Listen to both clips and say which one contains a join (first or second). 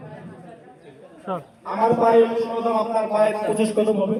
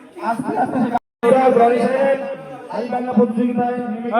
second